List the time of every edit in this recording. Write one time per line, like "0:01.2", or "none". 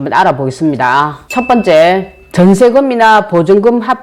0:01.2

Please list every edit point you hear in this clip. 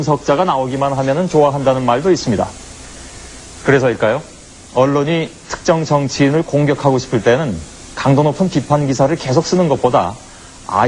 none

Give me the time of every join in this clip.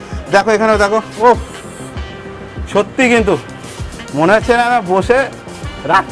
none

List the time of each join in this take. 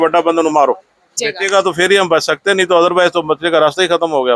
0:01.3

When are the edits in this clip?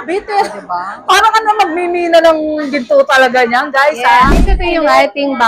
0:04.5

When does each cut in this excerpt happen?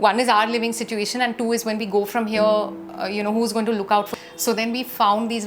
0:04.1

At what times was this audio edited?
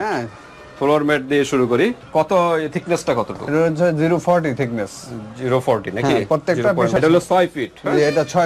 0:02.0
0:07.0

